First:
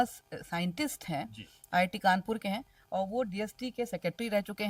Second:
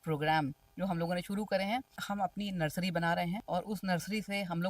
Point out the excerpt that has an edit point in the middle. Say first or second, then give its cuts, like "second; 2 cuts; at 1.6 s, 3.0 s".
second; 2 cuts; at 2.0 s, 3.4 s